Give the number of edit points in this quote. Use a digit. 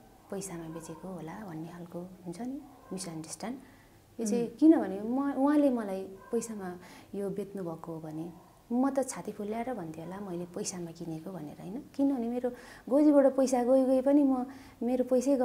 0